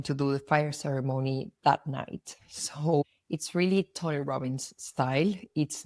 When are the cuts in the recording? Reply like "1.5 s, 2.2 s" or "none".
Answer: none